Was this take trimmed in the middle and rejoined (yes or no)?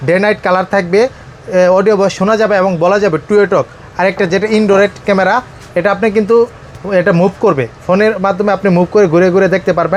no